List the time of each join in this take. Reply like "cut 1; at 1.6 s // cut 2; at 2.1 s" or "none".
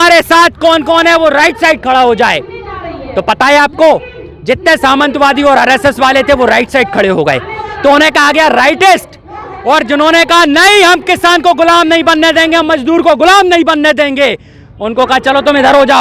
none